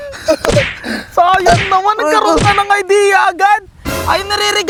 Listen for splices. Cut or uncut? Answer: uncut